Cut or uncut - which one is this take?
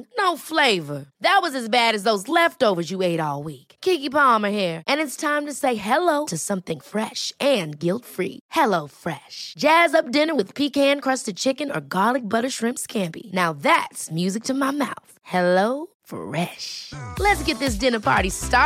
uncut